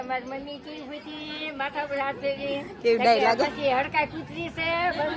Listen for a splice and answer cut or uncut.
uncut